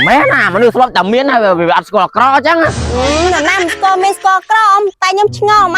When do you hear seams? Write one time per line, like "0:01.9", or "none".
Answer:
none